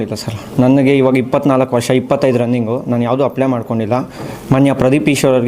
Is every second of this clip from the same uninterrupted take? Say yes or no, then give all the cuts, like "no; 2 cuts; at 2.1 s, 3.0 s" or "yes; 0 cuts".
no; 1 cut; at 4.3 s